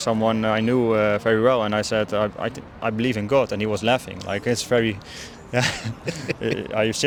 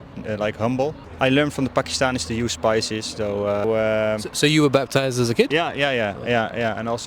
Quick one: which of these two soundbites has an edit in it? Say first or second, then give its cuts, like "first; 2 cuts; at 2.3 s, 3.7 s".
second; 2 cuts; at 1.0 s, 3.6 s